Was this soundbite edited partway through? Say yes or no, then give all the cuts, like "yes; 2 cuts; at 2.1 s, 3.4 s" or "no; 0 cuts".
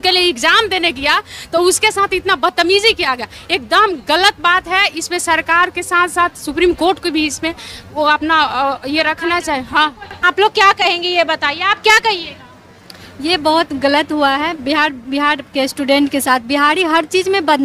no; 0 cuts